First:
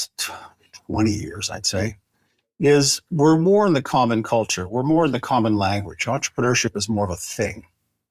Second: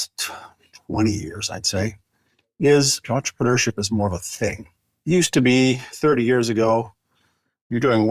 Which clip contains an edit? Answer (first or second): second